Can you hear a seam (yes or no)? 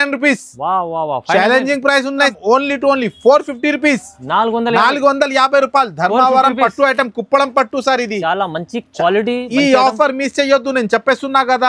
yes